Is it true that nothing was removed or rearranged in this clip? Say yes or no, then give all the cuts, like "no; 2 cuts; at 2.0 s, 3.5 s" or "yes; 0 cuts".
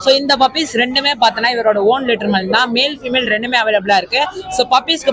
yes; 0 cuts